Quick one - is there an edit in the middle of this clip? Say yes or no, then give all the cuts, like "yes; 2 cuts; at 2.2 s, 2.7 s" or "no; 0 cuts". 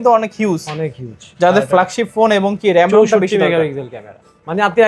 no; 0 cuts